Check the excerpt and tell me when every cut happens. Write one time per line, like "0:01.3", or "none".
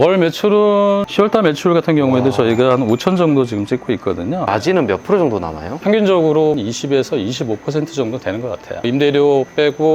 0:01.1
0:05.8
0:08.7